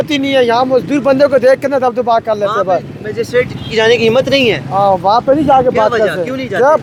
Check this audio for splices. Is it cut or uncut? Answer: uncut